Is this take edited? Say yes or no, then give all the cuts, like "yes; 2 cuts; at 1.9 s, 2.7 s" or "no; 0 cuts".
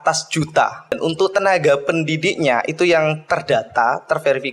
yes; 1 cut; at 0.9 s